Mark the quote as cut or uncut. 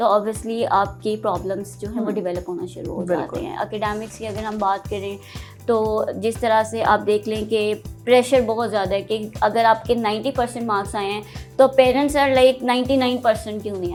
uncut